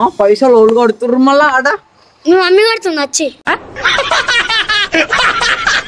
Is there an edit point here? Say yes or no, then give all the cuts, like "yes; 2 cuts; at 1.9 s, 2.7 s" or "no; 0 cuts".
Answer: no; 0 cuts